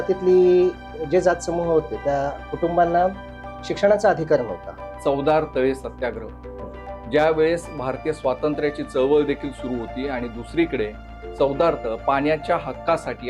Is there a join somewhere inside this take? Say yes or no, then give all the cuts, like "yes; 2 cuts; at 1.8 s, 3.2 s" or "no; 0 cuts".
yes; 1 cut; at 4.9 s